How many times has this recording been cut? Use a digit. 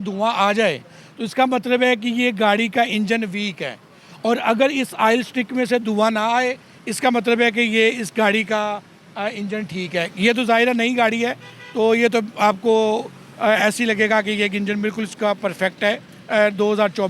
0